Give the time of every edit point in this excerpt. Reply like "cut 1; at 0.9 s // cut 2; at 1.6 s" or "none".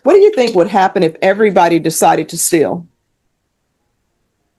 none